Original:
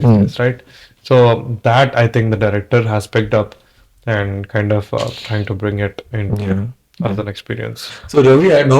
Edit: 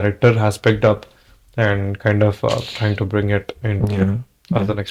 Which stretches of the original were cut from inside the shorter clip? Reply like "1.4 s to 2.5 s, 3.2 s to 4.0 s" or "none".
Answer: none

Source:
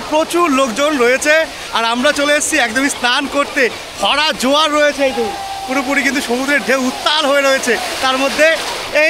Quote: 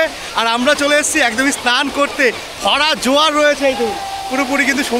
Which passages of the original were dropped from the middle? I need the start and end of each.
none

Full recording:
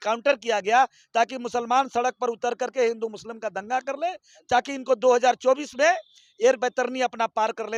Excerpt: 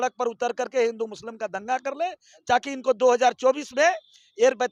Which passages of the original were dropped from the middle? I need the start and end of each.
none

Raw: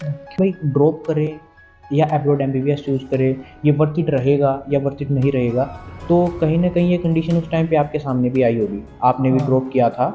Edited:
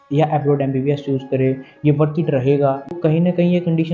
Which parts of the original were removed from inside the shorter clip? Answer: 4.7 s to 6.3 s

